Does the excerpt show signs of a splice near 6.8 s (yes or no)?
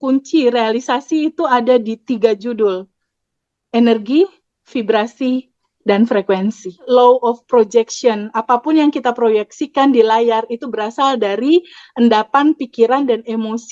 yes